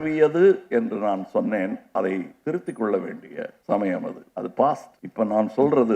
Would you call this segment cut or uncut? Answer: cut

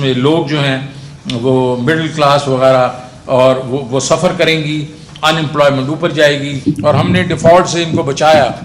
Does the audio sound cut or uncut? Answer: cut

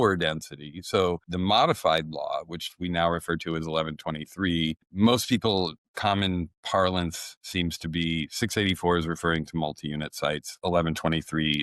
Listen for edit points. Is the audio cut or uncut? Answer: cut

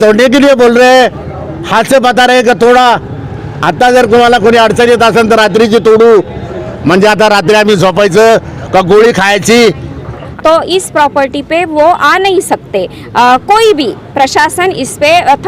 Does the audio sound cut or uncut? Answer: cut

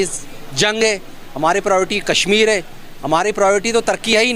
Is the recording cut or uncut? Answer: uncut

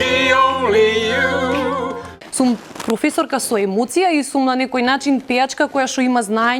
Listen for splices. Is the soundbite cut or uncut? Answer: cut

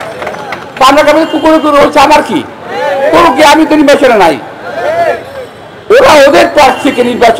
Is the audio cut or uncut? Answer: uncut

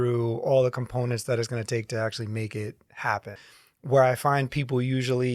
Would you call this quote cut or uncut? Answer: cut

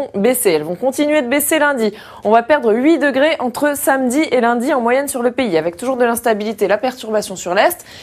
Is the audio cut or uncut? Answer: cut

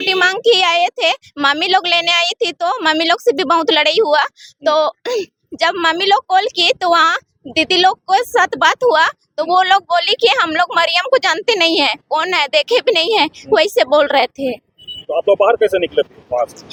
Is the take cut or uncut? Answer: uncut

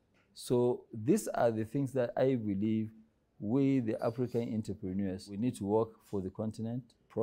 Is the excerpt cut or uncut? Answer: cut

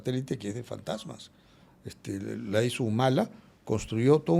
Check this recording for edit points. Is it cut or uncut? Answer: uncut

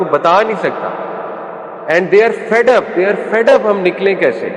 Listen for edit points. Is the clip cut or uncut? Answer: uncut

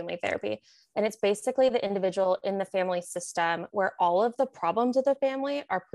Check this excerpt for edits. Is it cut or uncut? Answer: uncut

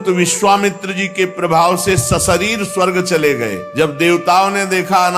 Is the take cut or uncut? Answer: cut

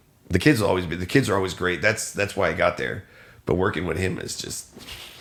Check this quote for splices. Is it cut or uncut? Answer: uncut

